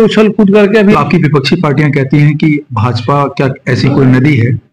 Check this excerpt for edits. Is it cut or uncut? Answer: cut